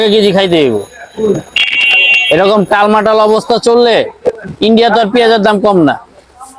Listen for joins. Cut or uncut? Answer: uncut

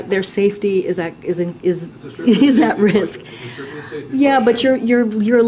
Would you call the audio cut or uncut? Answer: uncut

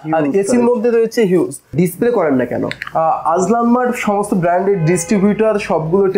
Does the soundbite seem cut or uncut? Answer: cut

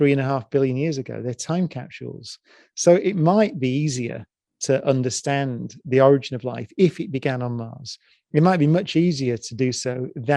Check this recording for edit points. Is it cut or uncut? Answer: uncut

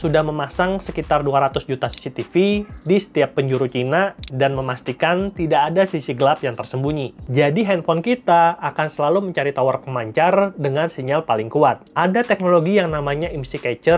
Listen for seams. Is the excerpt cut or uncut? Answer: cut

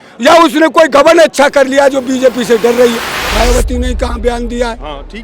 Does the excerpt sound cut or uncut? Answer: cut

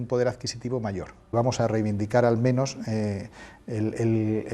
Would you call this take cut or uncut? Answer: cut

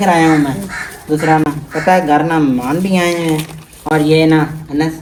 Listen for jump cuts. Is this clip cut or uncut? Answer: uncut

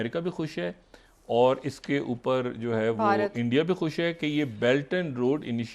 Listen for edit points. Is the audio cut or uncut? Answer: uncut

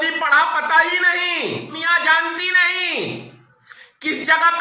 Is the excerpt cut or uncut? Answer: cut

